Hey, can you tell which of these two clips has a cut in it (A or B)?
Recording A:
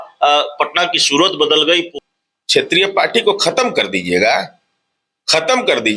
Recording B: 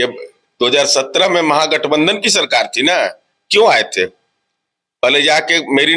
A